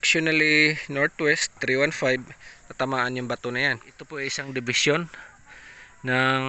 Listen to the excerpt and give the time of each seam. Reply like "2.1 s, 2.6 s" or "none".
4.4 s

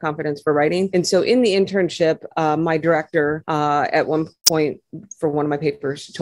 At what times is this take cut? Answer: none

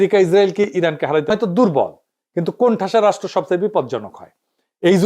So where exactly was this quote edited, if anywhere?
1.3 s

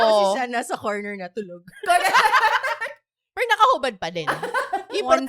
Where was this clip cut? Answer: none

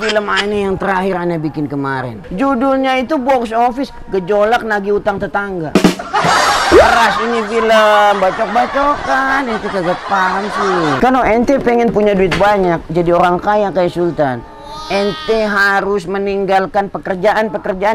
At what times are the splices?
2.2 s, 11.0 s

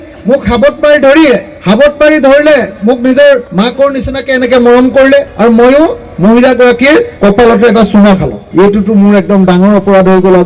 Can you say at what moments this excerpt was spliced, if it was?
1.5 s, 3.5 s, 5.3 s, 7.1 s, 8.4 s

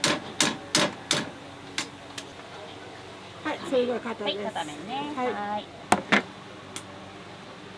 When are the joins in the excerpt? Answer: 2.3 s, 5.7 s

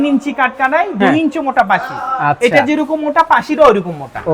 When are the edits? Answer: none

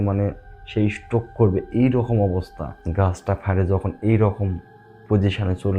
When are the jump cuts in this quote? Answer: 2.7 s

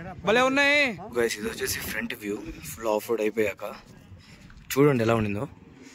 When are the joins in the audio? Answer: 1.0 s

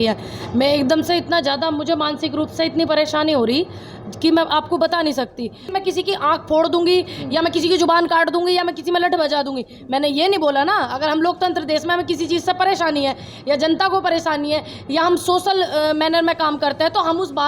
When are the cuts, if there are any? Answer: 2.1 s, 5.6 s

